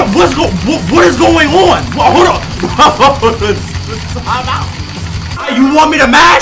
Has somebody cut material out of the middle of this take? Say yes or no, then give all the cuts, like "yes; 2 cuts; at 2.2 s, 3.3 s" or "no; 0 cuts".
yes; 1 cut; at 4.9 s